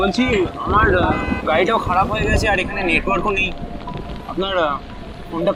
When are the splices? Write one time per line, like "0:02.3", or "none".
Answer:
none